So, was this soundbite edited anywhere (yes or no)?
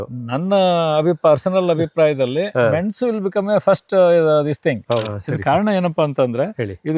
yes